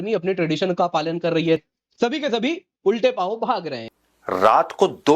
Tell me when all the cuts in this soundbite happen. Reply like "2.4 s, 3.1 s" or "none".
1.6 s, 3.8 s